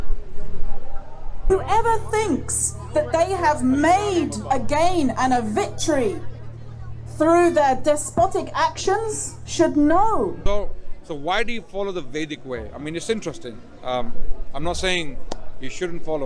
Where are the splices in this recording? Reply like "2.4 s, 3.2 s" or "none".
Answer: 1.5 s, 10.4 s